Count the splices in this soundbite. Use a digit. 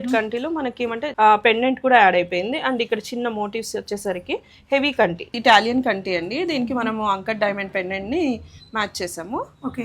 2